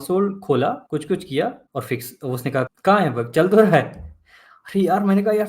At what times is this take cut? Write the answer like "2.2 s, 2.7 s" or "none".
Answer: 0.8 s, 1.6 s, 2.7 s